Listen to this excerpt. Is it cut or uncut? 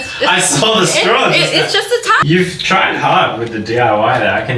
cut